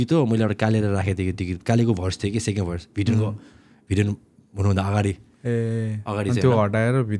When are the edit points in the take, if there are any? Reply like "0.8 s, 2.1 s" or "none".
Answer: none